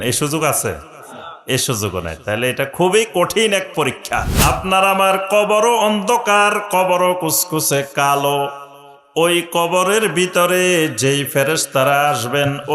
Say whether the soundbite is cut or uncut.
cut